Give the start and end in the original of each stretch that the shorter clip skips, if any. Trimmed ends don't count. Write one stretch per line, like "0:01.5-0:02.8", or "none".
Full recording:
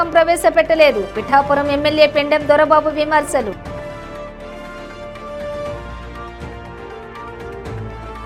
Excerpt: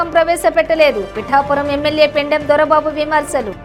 none